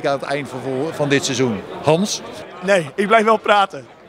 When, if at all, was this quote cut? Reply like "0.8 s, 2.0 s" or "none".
2.3 s